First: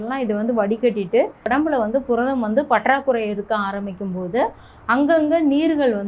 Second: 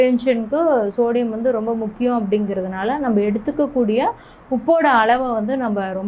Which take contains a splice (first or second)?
first